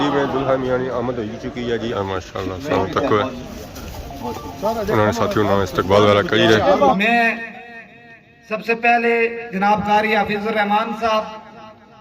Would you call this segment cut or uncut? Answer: cut